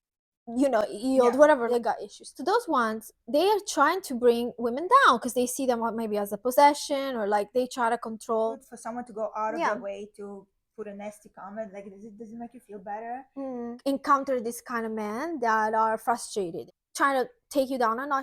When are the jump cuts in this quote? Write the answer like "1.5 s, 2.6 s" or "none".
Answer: 1.8 s, 8.6 s, 13.7 s, 16.7 s